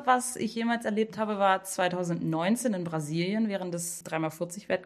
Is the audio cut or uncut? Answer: cut